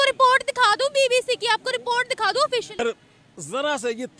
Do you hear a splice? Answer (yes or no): yes